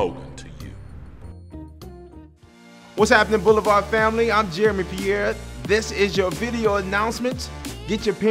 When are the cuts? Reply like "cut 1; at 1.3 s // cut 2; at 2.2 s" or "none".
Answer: cut 1; at 2.6 s